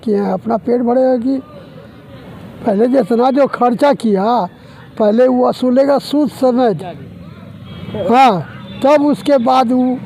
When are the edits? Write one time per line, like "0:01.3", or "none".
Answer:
none

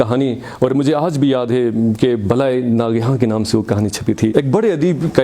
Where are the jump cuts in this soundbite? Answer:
0:04.3

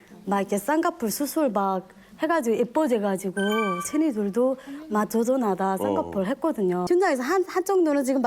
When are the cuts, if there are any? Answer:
0:06.8

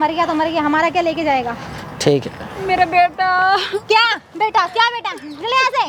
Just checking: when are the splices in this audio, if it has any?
none

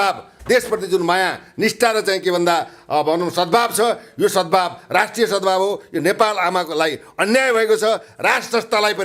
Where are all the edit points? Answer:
none

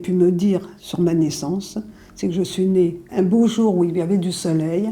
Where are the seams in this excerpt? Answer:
0:03.0

